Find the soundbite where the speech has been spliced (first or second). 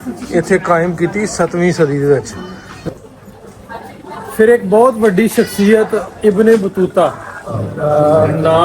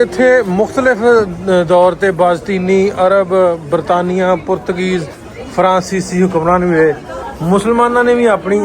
first